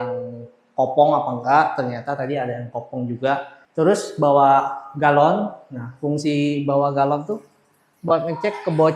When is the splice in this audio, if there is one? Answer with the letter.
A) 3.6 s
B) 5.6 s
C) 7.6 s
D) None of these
A